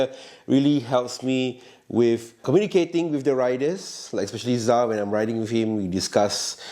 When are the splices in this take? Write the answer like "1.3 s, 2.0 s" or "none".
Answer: 2.4 s